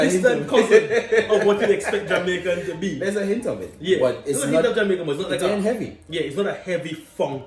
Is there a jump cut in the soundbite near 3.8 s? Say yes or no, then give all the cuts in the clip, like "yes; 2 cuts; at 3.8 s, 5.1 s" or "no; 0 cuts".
no; 0 cuts